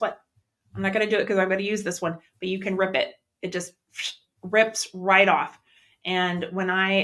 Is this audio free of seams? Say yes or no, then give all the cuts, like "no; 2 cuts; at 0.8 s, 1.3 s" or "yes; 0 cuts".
yes; 0 cuts